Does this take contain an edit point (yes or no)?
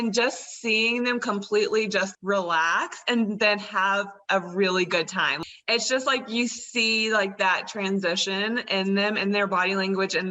yes